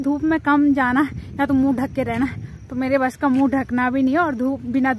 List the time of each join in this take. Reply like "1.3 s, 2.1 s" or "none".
none